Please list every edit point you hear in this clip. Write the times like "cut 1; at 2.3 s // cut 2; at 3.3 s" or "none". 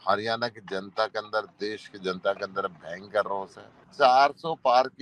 cut 1; at 3.8 s